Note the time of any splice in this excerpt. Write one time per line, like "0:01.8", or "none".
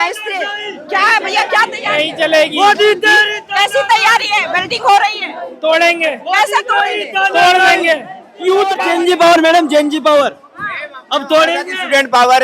0:08.8